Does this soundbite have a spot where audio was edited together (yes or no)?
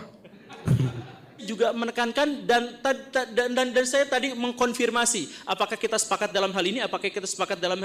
yes